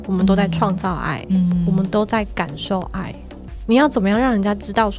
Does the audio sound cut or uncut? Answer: uncut